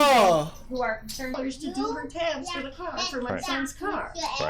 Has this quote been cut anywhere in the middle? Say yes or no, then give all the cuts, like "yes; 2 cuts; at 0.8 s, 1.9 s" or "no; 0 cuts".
yes; 1 cut; at 1.4 s